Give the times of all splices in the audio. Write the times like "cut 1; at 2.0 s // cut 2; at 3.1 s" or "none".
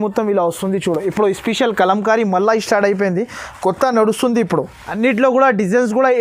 cut 1; at 4.8 s